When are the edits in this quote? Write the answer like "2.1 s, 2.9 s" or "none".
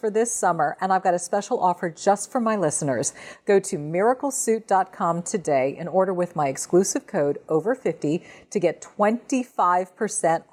none

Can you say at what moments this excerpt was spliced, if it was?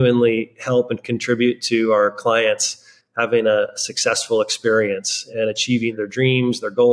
none

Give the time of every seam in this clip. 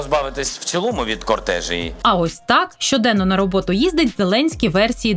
2.0 s

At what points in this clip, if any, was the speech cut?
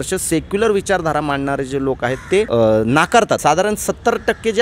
2.5 s, 3.4 s

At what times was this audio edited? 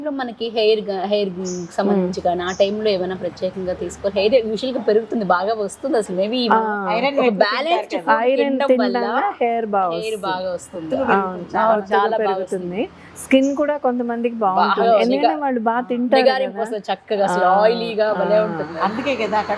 none

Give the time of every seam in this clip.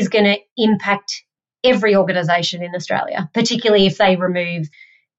none

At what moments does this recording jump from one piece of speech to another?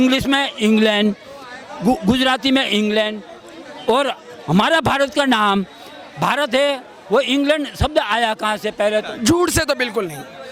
9.1 s

